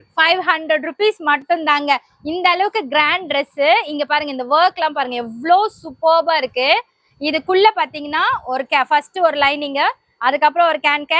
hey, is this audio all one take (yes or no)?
yes